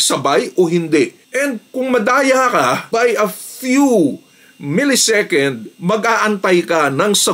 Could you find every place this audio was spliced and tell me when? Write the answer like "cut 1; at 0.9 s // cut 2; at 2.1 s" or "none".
none